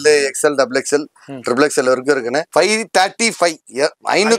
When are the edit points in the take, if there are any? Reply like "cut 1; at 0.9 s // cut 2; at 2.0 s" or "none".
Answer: cut 1; at 2.5 s

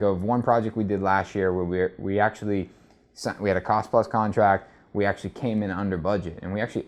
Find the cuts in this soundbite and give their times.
none

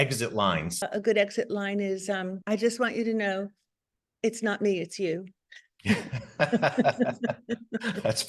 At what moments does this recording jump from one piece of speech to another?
cut 1; at 0.9 s // cut 2; at 2.3 s

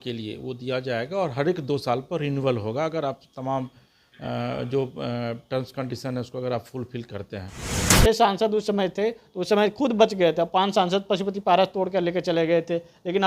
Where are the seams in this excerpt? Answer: cut 1; at 7.9 s

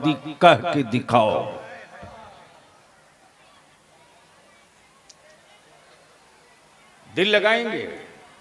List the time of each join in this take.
none

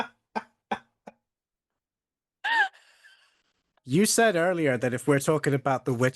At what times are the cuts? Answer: cut 1; at 3.7 s

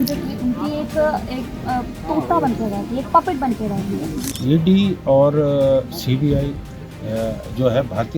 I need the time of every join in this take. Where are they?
cut 1; at 4.3 s

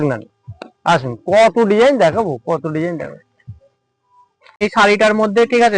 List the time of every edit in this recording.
cut 1; at 4.6 s

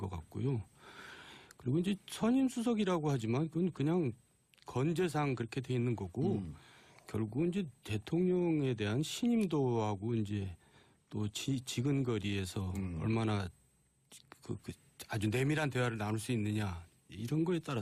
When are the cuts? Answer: none

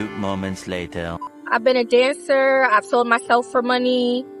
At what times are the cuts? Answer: cut 1; at 1.2 s

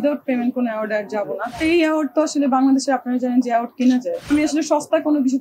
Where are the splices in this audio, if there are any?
cut 1; at 1.6 s // cut 2; at 4.3 s

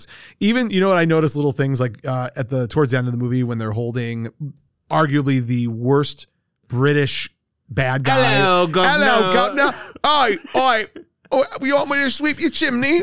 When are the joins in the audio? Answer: none

